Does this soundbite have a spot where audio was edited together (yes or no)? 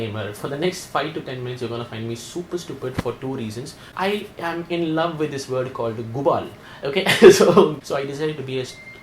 yes